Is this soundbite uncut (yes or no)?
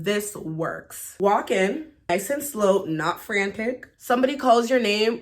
no